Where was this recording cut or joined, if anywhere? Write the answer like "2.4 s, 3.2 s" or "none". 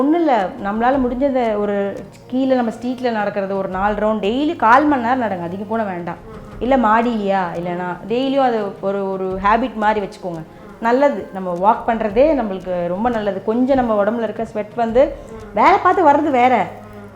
none